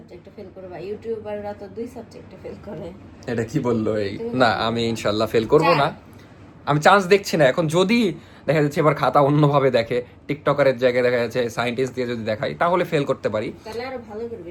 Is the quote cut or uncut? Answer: uncut